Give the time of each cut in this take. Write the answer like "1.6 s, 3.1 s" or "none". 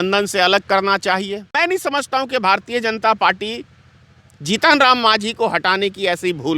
1.5 s